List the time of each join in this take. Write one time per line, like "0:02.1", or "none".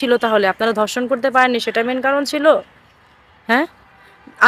none